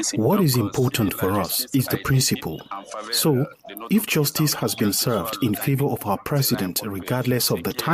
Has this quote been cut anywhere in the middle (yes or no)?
no